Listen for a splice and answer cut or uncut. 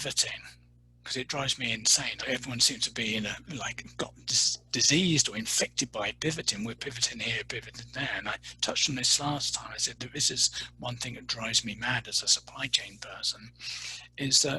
cut